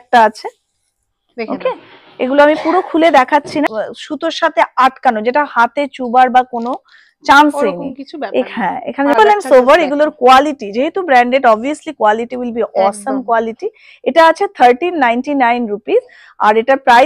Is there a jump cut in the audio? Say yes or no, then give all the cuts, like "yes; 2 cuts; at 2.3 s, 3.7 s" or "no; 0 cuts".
yes; 2 cuts; at 3.7 s, 9.1 s